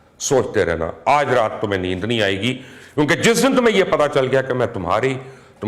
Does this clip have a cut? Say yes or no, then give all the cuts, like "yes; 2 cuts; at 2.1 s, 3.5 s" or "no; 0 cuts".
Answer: no; 0 cuts